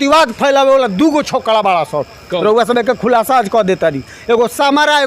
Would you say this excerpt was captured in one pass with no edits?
yes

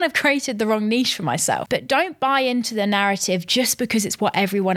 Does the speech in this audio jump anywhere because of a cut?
yes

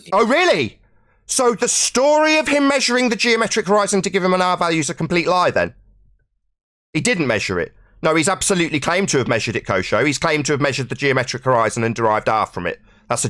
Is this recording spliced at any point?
no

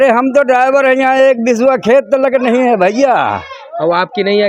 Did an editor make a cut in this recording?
no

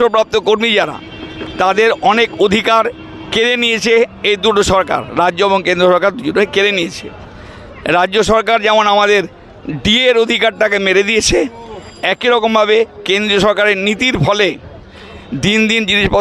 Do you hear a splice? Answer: no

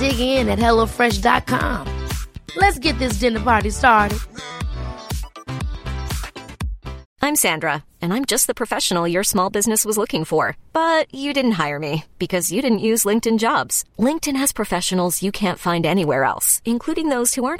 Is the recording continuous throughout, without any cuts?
no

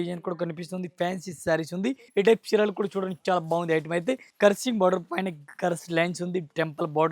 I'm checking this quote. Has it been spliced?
yes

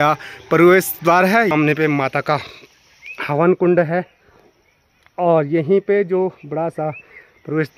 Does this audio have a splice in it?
yes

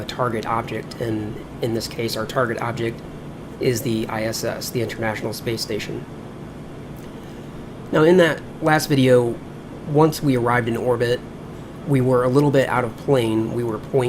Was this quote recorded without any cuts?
no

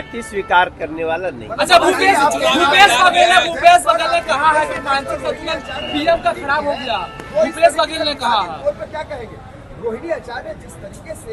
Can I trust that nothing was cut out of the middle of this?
yes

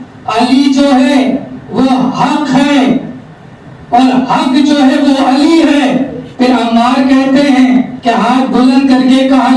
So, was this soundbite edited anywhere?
yes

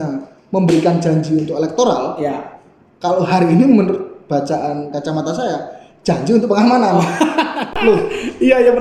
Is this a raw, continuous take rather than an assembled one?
yes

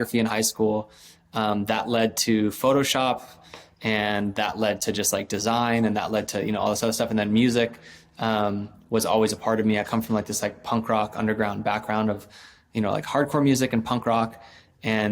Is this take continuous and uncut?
yes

